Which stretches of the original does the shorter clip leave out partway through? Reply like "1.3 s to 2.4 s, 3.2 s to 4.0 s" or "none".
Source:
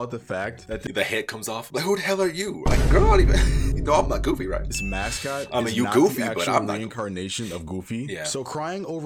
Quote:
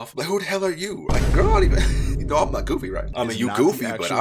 4.7 s to 5.5 s